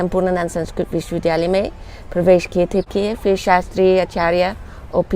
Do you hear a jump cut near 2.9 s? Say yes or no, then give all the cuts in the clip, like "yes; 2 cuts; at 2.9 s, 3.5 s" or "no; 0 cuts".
yes; 1 cut; at 2.9 s